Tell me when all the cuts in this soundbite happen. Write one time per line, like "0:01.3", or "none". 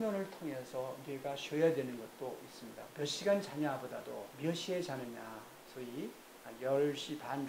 0:02.9